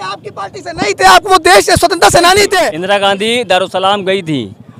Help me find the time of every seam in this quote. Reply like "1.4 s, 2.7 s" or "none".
2.7 s